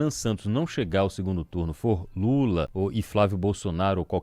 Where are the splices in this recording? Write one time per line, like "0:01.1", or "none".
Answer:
0:02.7